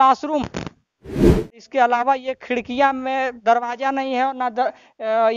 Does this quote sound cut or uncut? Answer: cut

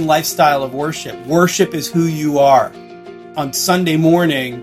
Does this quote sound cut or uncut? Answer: cut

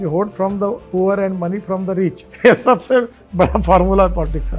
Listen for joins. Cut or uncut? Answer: cut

